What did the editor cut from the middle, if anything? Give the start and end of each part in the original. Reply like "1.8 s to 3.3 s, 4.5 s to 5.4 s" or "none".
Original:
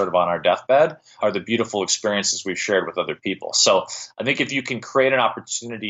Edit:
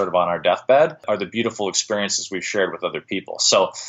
1.0 s to 1.1 s

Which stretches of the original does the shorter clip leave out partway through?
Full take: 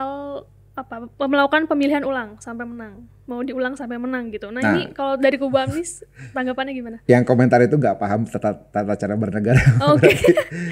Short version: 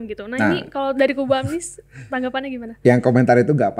none

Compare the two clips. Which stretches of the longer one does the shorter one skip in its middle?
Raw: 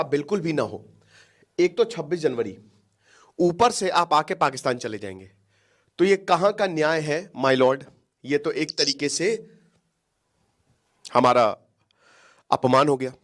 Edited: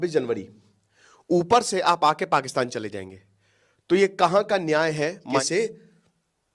7.4 s to 9.0 s

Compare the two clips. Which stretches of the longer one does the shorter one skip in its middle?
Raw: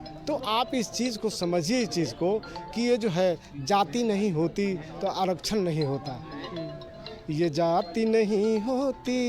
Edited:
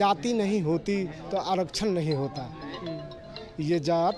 none

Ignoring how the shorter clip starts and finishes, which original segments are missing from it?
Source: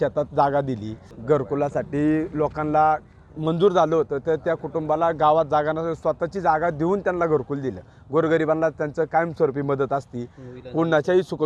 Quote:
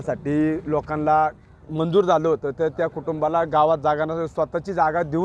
none

